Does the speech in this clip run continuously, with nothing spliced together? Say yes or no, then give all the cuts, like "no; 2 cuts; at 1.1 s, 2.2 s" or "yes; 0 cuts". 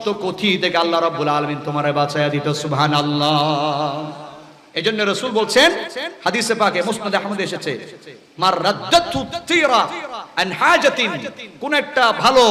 yes; 0 cuts